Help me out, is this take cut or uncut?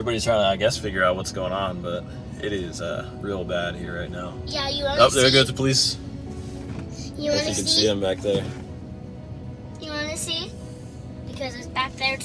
uncut